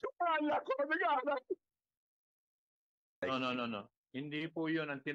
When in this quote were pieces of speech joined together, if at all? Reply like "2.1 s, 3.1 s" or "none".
3.2 s